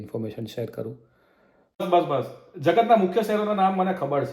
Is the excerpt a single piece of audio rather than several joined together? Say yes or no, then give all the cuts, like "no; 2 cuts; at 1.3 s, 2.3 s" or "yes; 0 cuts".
no; 1 cut; at 1.8 s